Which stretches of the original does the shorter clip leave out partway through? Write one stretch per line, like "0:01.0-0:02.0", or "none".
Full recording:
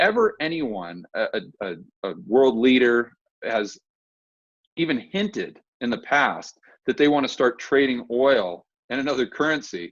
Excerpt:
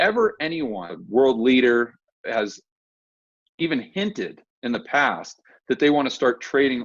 0:00.9-0:02.1